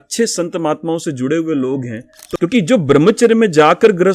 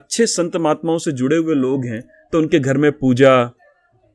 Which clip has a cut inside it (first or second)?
first